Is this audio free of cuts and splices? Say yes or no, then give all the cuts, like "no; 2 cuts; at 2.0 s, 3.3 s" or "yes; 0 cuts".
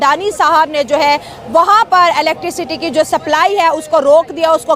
yes; 0 cuts